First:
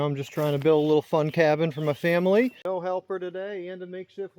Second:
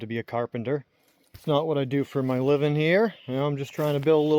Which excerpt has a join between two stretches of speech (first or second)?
first